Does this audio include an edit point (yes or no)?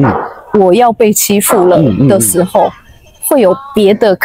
no